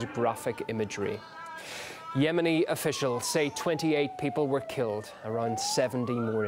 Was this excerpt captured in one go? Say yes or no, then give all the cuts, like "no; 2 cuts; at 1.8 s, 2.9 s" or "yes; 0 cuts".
no; 1 cut; at 3.2 s